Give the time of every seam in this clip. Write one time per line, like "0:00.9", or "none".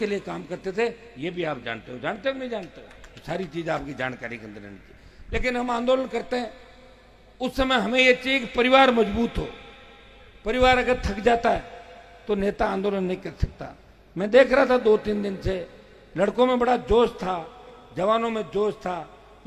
none